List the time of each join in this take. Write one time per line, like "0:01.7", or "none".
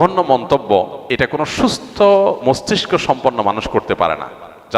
0:01.0